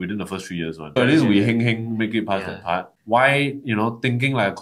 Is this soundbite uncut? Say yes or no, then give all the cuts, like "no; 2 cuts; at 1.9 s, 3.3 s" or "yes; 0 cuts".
no; 2 cuts; at 1.0 s, 2.9 s